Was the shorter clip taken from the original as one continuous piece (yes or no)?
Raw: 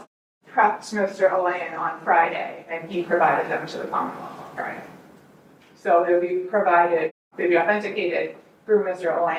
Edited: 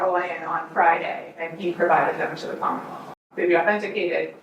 no